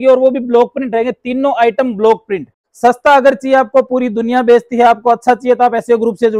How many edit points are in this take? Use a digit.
1